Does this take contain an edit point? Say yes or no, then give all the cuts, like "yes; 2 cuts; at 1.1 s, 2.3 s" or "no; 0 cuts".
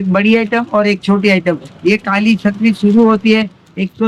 no; 0 cuts